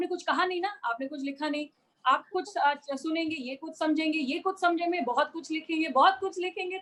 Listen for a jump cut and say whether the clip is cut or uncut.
uncut